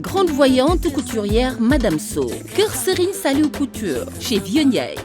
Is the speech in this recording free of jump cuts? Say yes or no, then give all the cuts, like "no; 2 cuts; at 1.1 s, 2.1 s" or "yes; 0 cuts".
yes; 0 cuts